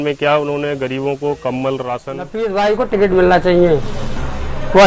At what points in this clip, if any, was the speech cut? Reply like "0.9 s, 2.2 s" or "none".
2.3 s